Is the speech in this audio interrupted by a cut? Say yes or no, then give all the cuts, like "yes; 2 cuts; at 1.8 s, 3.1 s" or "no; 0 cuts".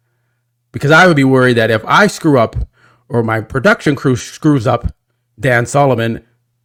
no; 0 cuts